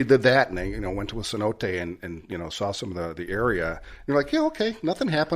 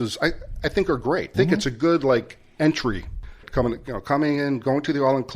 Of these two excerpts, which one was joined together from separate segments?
second; 2 cuts; at 1.3 s, 3.2 s

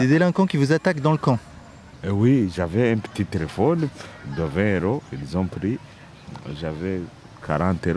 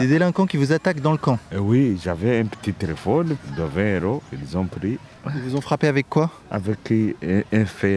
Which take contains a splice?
second; 4 cuts; at 1.5 s, 3.5 s, 5.1 s, 6.5 s

